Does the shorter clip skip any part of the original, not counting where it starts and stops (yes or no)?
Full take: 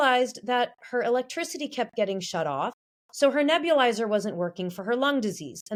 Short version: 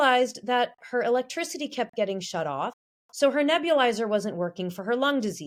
no